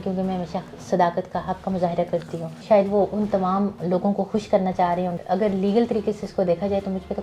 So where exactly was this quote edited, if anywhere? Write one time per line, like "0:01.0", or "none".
0:02.6
0:05.2